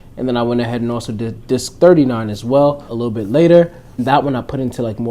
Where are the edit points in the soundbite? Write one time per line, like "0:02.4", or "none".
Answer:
0:01.4
0:02.9
0:03.9